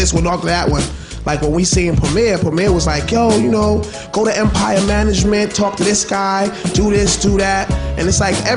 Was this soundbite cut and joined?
no; 0 cuts

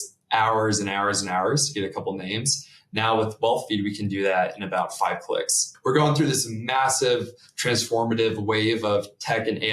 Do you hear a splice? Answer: yes; 1 cut; at 5.7 s

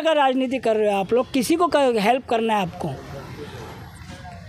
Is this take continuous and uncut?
yes; 0 cuts

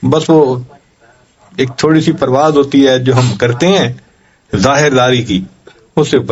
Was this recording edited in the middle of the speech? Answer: no; 0 cuts

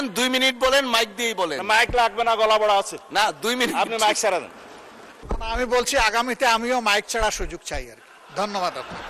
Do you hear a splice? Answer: yes; 1 cut; at 5.2 s

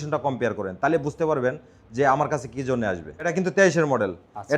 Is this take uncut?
no; 1 cut; at 3.3 s

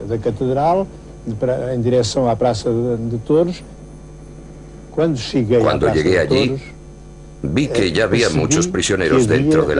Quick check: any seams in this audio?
no; 0 cuts

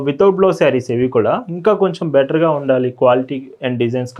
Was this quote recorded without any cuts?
yes; 0 cuts

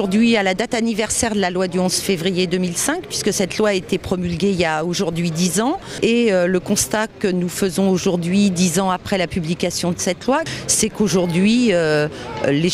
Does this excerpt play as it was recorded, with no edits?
no; 1 cut; at 1.7 s

